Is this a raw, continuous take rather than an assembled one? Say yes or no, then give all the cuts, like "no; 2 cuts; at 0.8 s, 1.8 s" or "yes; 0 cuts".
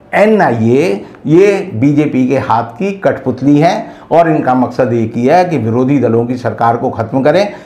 yes; 0 cuts